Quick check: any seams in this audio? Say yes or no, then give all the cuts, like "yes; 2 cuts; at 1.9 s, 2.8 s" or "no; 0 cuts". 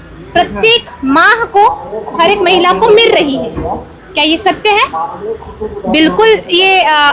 no; 0 cuts